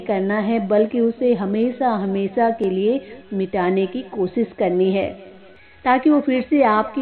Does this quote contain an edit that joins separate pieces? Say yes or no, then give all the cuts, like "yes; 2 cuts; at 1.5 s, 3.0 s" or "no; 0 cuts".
no; 0 cuts